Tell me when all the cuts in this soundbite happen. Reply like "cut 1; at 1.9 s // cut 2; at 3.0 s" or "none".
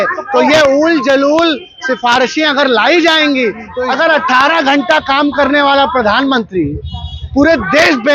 cut 1; at 3.7 s